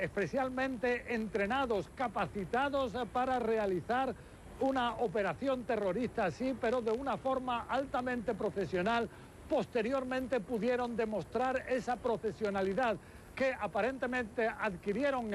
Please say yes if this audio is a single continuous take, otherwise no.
no